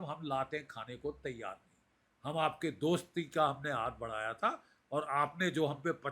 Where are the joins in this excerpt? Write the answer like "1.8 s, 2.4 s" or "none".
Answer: none